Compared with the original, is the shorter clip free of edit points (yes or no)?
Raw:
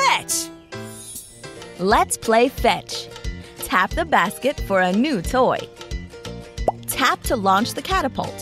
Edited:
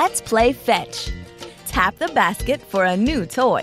yes